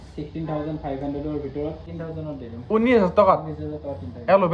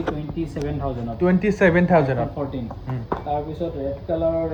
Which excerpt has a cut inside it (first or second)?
first